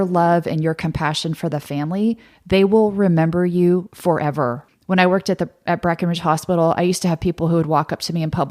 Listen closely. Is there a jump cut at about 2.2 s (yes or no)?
no